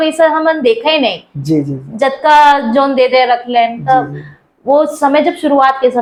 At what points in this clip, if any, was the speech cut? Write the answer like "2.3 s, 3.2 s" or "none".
none